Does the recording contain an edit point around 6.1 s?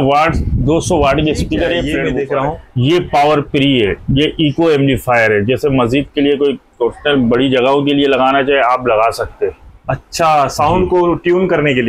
no; 1 cut; at 2.0 s

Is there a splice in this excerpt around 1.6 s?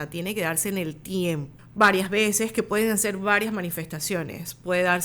yes; 1 cut; at 1.6 s

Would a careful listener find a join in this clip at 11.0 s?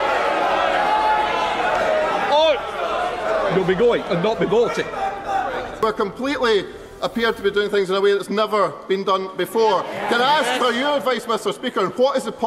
no; 1 cut; at 5.8 s

